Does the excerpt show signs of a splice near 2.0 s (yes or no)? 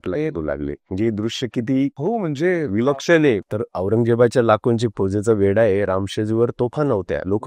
yes